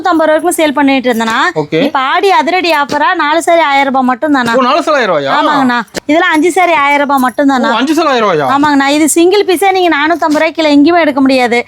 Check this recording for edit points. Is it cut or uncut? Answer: cut